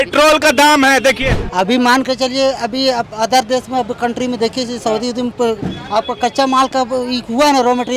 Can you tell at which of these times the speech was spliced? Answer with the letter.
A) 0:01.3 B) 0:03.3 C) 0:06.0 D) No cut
A